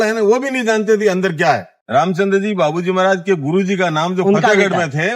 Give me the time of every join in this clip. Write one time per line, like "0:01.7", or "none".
0:01.7